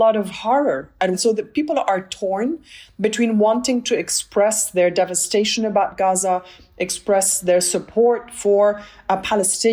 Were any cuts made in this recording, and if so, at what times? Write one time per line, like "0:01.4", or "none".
0:01.1

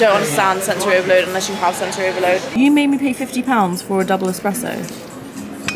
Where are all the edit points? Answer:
0:02.5

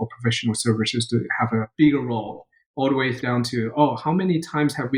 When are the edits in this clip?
0:01.7
0:03.2

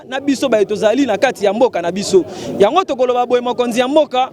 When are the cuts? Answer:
none

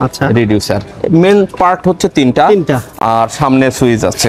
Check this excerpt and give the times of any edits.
none

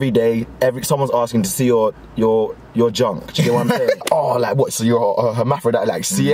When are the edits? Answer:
0:04.0

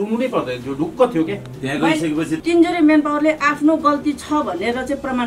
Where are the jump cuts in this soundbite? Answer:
0:02.4

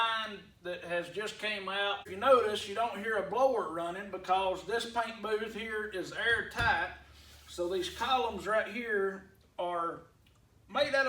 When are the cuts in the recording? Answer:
0:02.1

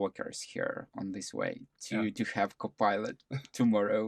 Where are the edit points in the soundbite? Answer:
none

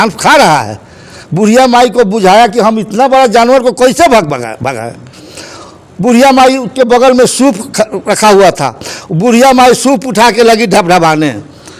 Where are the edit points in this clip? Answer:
none

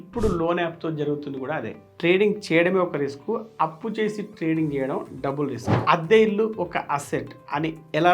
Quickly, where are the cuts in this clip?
0:01.8
0:05.7

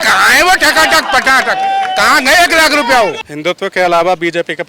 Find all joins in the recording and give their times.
0:03.3

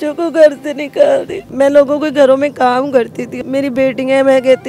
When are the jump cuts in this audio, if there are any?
0:01.4
0:03.3

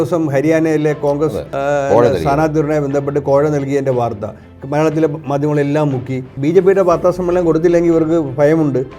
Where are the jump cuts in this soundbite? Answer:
0:01.5
0:06.3

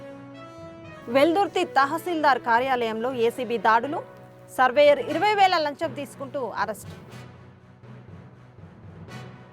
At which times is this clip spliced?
0:01.0

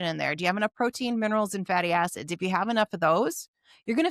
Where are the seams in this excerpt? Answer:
none

